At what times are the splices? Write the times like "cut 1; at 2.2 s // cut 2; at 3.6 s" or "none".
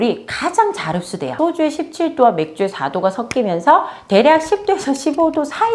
cut 1; at 1.3 s